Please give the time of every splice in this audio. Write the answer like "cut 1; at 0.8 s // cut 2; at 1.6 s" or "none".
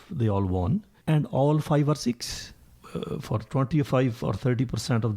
cut 1; at 0.9 s // cut 2; at 2.7 s